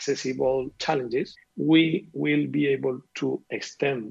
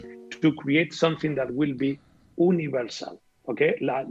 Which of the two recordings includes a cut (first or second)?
first